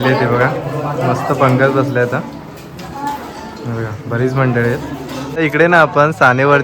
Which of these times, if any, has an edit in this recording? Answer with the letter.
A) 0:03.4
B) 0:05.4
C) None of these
B